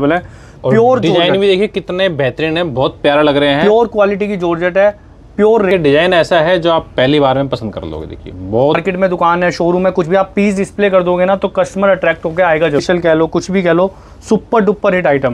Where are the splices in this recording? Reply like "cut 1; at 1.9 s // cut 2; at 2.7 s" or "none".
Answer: cut 1; at 5.7 s // cut 2; at 8.8 s // cut 3; at 12.8 s